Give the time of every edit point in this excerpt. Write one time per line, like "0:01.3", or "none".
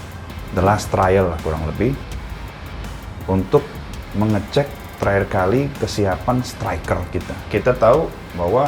0:07.5